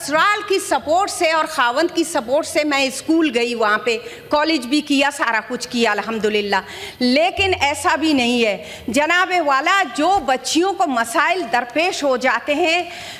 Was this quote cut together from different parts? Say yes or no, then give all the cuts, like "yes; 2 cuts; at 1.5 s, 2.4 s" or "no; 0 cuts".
no; 0 cuts